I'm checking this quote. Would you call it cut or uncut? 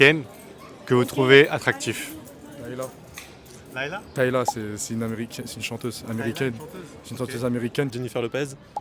cut